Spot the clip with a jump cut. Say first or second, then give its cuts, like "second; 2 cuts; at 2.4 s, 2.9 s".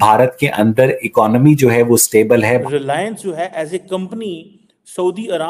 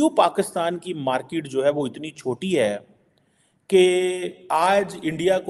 first; 1 cut; at 2.6 s